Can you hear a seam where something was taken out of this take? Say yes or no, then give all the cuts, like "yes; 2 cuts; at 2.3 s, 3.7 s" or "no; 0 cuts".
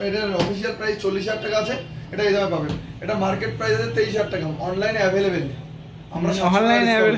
no; 0 cuts